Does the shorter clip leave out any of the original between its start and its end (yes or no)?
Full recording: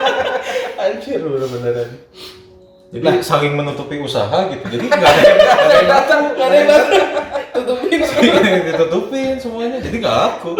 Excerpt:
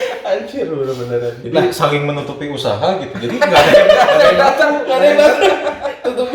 yes